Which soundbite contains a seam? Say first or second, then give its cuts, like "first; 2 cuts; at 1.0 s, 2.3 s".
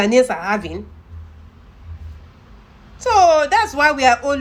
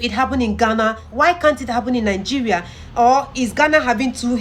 second; 1 cut; at 1.1 s